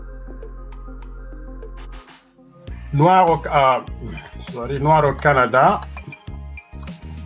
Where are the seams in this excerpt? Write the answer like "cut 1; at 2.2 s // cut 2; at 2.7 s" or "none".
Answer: cut 1; at 2.8 s